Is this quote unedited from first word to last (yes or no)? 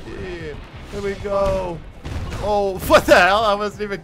yes